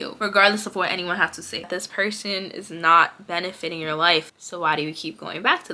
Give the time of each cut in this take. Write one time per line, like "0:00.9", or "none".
0:01.7
0:04.4